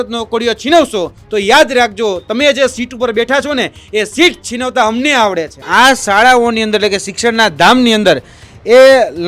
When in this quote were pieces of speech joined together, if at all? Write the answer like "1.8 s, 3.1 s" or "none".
5.6 s